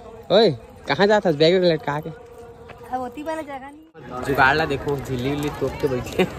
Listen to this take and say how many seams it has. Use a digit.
1